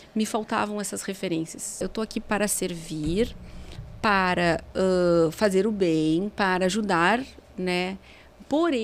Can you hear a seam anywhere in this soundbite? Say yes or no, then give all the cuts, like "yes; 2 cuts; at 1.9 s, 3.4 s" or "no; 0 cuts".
yes; 1 cut; at 1.8 s